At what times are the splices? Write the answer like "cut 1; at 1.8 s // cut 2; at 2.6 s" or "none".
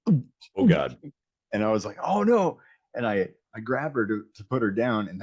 none